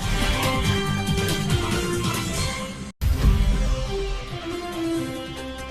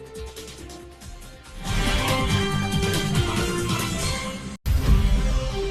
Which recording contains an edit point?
first; 2 cuts; at 3.0 s, 4.6 s

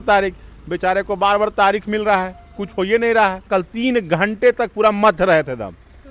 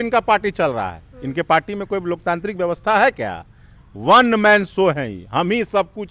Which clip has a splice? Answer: first; 1 cut; at 3.4 s

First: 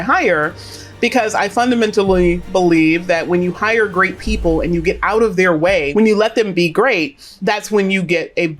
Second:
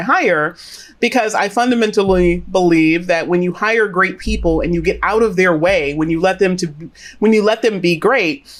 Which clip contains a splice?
first; 2 cuts; at 5.9 s, 7.2 s

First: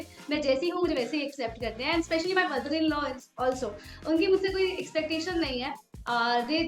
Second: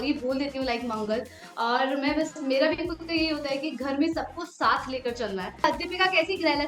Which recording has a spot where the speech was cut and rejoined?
second; 1 cut; at 5.6 s

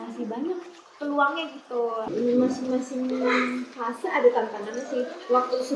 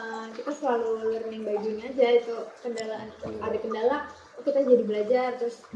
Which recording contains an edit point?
first; 1 cut; at 2.1 s

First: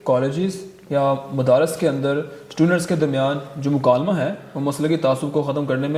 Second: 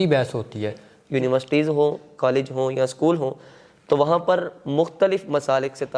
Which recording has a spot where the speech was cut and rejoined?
second; 1 cut; at 0.9 s

